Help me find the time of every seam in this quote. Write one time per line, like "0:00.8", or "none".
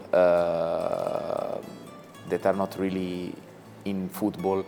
none